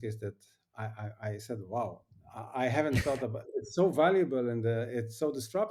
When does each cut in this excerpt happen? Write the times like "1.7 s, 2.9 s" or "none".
none